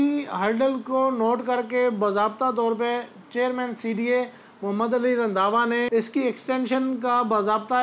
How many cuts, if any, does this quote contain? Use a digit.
0